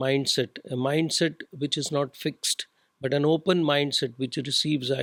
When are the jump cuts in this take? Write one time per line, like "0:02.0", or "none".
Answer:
none

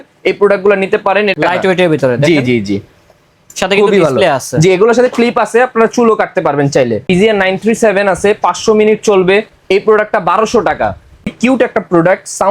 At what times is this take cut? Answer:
0:01.3
0:07.1
0:11.1

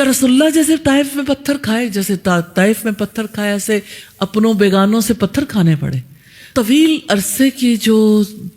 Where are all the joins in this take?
0:06.5

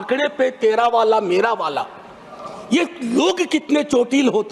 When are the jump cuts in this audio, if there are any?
none

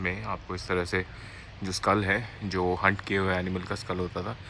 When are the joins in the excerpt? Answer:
none

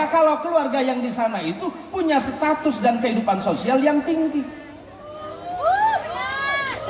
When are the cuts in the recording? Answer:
none

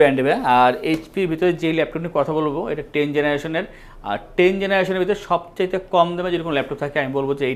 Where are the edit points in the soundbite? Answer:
none

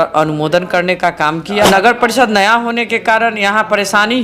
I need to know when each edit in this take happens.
0:01.7

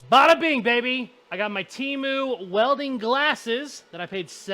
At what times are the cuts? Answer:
0:01.2

